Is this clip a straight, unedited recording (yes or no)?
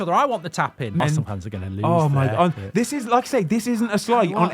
no